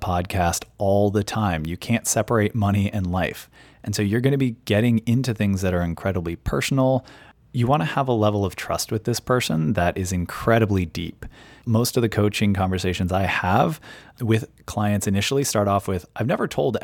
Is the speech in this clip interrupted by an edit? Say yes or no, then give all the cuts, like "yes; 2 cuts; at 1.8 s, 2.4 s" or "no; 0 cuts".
no; 0 cuts